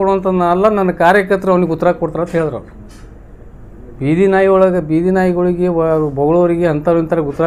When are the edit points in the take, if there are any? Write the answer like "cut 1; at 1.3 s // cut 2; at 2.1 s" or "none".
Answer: none